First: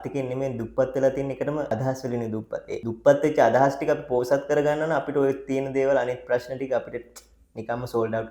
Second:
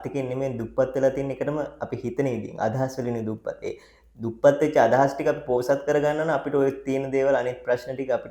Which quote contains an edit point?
first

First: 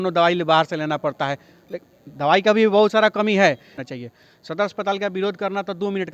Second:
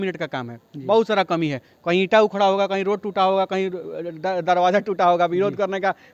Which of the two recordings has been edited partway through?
first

